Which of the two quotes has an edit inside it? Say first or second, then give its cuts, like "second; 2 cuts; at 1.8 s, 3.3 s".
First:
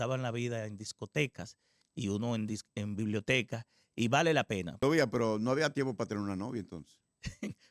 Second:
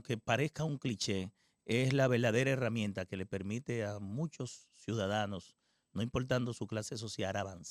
first; 1 cut; at 4.7 s